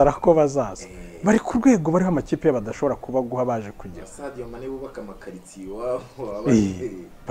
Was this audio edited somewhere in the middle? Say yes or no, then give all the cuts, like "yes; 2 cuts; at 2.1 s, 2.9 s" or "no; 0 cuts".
no; 0 cuts